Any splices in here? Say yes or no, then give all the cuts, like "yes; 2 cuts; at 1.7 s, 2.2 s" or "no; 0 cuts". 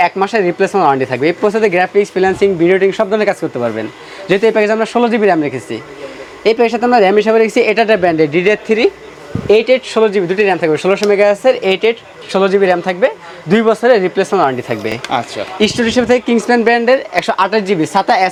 no; 0 cuts